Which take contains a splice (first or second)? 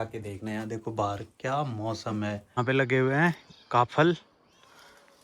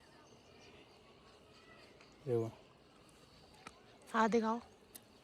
first